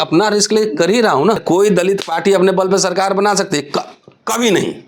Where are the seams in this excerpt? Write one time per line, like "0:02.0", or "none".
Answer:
0:01.4